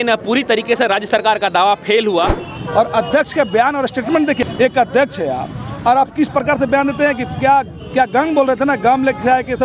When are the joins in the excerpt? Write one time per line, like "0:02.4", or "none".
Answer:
0:02.5
0:04.4